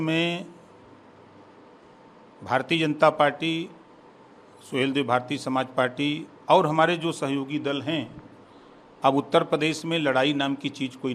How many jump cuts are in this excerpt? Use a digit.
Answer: 0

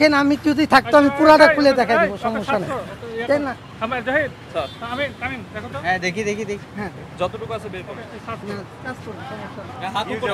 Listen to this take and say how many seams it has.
0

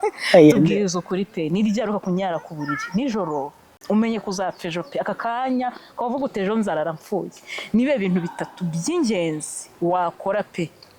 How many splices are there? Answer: 1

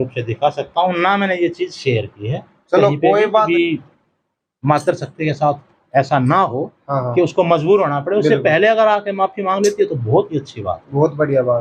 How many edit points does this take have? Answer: 1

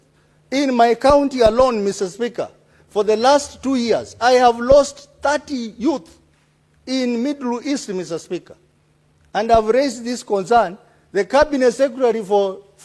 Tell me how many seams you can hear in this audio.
0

